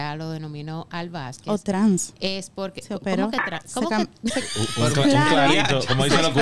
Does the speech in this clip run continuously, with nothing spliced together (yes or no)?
yes